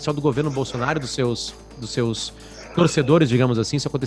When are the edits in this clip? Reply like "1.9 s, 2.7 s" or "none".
none